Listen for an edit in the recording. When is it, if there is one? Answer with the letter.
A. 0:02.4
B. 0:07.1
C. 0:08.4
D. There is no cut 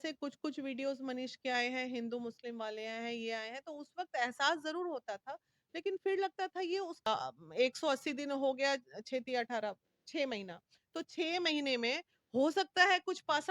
B